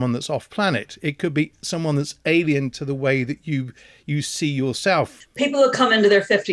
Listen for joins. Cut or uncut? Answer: cut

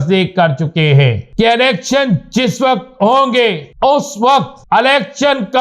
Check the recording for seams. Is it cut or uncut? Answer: cut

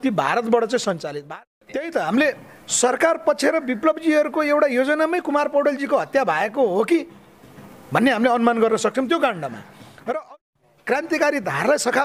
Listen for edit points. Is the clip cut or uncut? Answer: cut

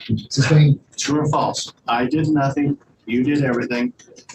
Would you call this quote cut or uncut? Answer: cut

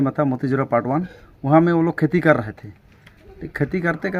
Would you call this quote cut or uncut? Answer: uncut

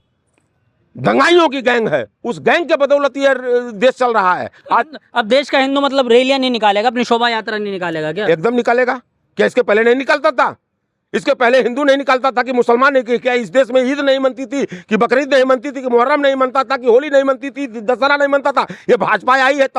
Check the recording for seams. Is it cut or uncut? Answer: uncut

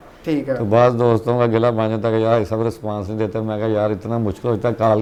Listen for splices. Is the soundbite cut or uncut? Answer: uncut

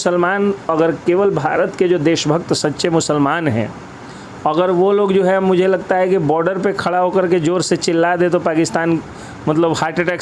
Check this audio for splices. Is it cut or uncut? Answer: uncut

